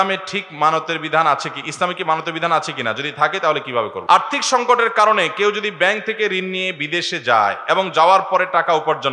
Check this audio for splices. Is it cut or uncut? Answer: cut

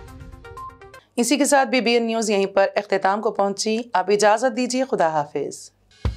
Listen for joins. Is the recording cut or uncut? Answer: uncut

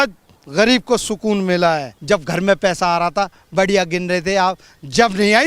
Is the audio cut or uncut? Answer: cut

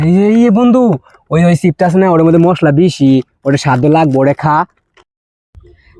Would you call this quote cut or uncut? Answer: cut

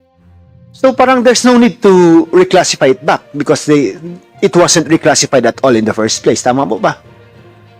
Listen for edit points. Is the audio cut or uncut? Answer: uncut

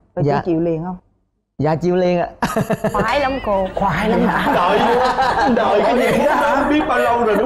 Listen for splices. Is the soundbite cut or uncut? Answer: uncut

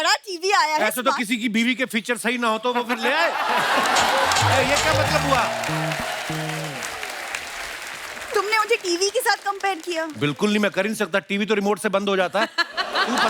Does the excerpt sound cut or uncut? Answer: uncut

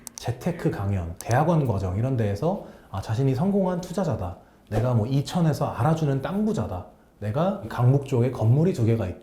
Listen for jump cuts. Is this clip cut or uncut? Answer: cut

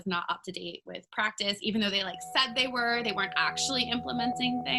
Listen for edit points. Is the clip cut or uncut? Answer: uncut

